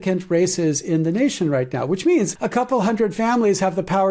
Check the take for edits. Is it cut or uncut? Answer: cut